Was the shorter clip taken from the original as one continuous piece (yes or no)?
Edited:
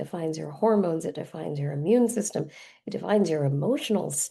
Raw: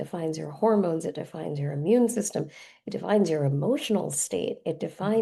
yes